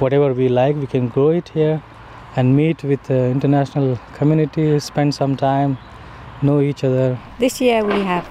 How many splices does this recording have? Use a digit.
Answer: 1